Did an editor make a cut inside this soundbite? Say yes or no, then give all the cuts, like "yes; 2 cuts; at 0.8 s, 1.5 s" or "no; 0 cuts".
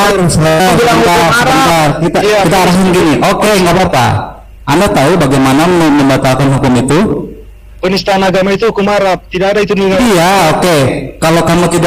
no; 0 cuts